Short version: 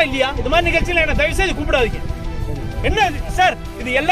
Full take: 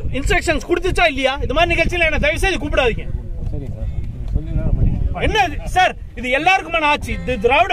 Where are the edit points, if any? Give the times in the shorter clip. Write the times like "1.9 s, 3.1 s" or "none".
2.7 s